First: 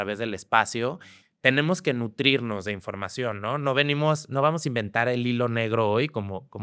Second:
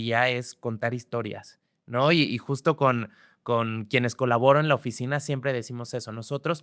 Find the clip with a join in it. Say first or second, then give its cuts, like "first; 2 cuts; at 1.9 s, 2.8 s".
first; 1 cut; at 1.1 s